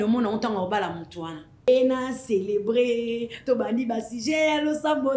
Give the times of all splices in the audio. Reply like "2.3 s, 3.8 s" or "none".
1.7 s